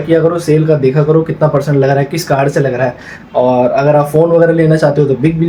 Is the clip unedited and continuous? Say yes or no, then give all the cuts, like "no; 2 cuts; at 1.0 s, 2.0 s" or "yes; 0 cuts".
yes; 0 cuts